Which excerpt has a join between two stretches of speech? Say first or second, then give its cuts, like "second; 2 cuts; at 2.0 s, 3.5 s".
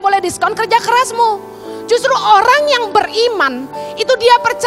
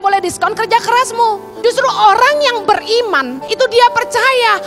second; 2 cuts; at 1.5 s, 3.4 s